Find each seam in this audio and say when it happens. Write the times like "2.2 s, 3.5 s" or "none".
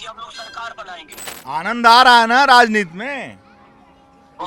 1.2 s